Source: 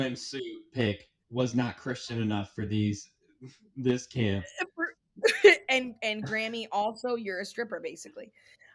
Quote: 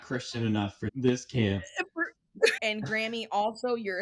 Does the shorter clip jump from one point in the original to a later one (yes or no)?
yes